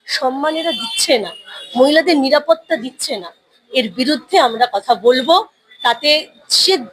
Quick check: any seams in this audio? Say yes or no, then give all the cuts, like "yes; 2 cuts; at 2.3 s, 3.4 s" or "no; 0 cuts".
no; 0 cuts